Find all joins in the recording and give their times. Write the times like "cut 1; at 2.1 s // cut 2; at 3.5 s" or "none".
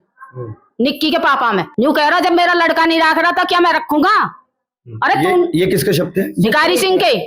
cut 1; at 1.7 s